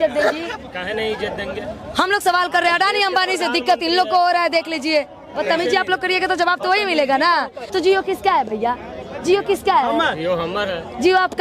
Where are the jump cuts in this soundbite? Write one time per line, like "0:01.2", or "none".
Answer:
0:05.4
0:07.6

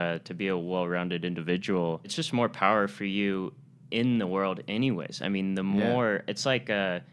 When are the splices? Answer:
0:02.1

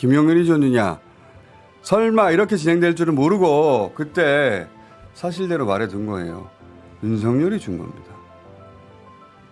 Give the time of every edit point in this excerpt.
0:01.4

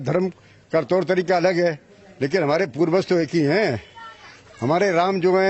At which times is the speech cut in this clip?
none

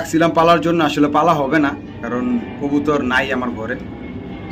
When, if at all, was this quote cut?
none

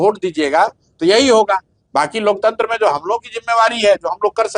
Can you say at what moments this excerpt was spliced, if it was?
none

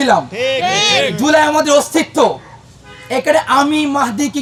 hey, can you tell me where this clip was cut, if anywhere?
none

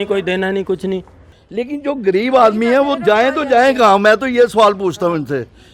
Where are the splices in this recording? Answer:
0:01.4

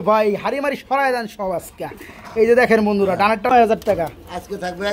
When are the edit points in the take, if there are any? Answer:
0:03.5

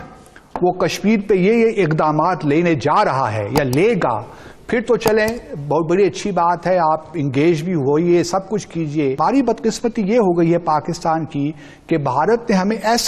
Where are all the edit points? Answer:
none

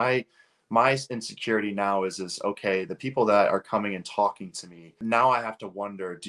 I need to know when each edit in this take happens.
0:04.9

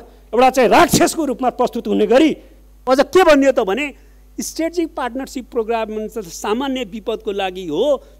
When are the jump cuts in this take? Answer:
0:02.8

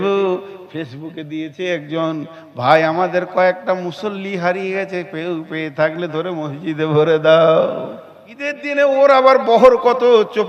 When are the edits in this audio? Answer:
0:08.6

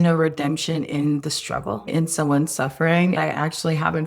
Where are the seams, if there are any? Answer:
0:01.9
0:03.2

